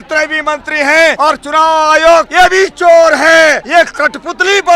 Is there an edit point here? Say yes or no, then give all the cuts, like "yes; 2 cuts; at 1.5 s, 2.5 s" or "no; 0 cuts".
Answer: yes; 3 cuts; at 1.2 s, 2.3 s, 3.6 s